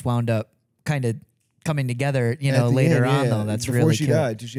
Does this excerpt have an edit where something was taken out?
no; 0 cuts

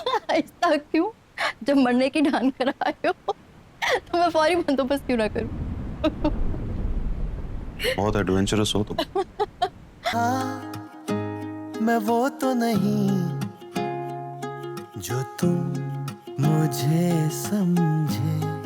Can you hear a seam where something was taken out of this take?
yes; 1 cut; at 10.1 s

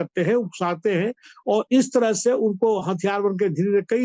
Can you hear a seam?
no; 0 cuts

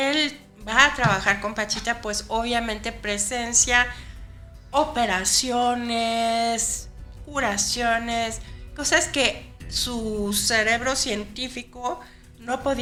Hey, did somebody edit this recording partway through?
no; 0 cuts

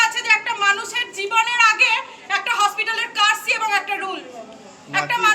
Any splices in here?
no; 0 cuts

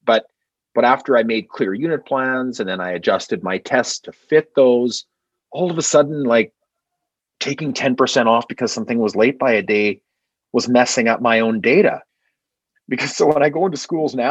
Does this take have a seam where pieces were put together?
yes; 1 cut; at 12.1 s

